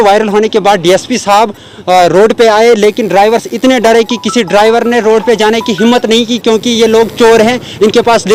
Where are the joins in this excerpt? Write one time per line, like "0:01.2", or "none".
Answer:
none